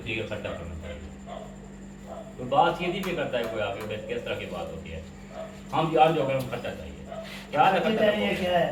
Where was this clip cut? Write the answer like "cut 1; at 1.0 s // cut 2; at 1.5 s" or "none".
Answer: none

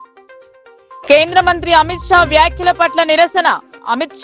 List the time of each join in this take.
cut 1; at 1.0 s

